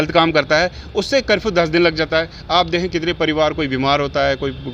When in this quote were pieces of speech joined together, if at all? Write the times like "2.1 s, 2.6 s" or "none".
none